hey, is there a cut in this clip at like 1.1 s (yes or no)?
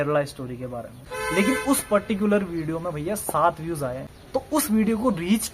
yes